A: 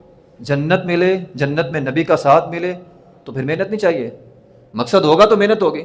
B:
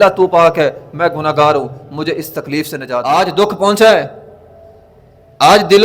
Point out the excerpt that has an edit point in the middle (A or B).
B